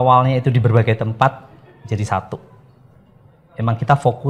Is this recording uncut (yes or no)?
yes